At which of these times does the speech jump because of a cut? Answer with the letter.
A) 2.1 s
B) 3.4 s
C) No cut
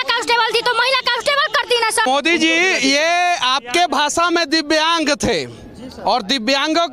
A